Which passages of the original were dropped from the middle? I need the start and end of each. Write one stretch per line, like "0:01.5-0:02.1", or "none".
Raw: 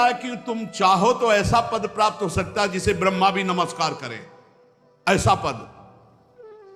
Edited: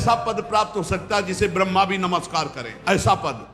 0:04.1-0:04.8